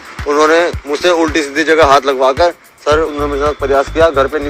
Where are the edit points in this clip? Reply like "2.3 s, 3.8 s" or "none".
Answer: 3.1 s